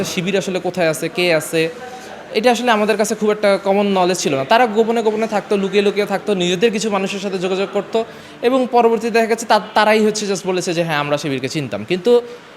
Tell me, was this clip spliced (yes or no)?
no